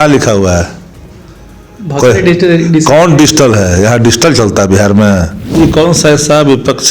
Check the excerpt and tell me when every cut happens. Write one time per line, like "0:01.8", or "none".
0:05.6